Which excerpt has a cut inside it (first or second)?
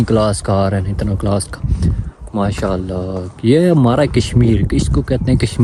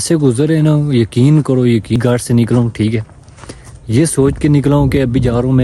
second